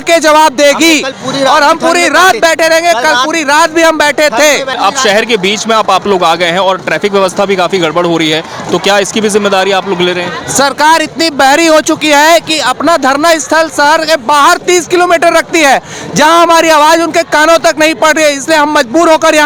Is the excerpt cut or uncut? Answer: uncut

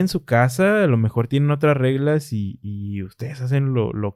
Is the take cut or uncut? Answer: uncut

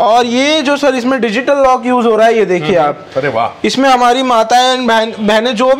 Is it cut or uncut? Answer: uncut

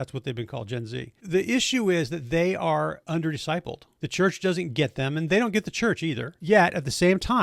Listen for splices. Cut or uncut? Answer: cut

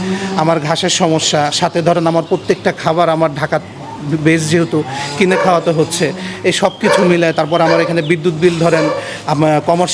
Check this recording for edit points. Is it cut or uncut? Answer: uncut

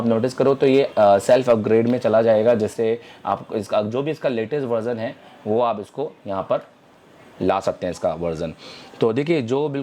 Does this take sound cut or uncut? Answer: uncut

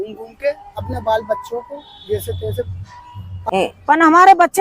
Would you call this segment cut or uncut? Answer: cut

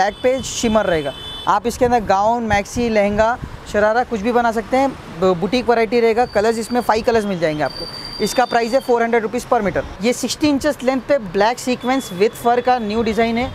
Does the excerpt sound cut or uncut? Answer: uncut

